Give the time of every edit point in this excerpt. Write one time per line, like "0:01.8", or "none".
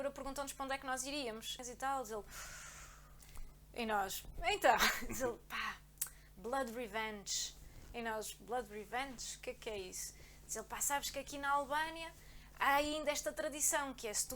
0:01.6